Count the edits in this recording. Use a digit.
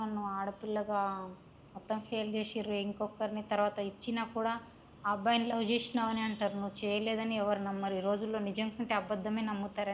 0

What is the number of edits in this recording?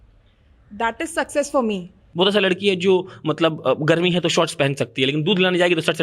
1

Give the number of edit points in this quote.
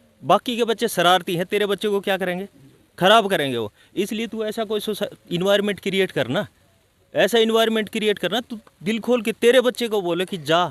0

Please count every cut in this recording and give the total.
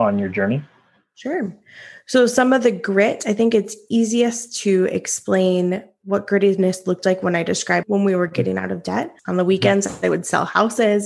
2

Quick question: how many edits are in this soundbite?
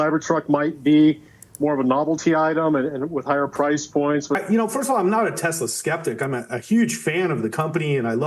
1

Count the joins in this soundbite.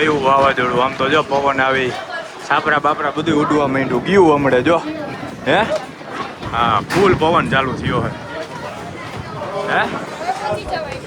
0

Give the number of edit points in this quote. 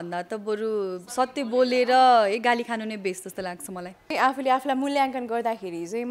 1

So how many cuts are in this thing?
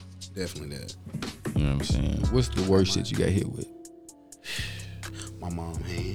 1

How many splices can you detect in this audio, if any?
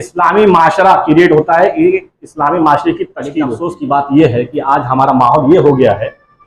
1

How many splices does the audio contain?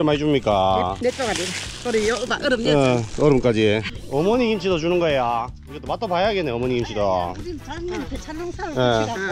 1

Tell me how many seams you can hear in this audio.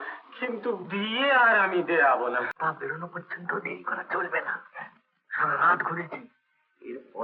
1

